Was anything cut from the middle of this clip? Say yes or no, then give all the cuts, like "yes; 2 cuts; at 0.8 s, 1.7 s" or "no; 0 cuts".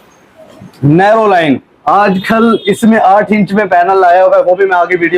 no; 0 cuts